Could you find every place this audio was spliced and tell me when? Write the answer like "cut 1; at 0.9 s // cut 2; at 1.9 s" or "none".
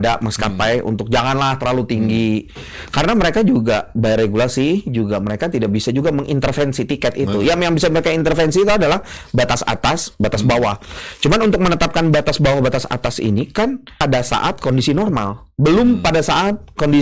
cut 1; at 14.0 s